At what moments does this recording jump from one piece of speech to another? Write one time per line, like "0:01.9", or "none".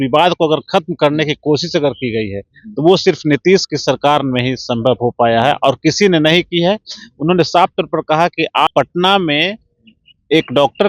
0:08.7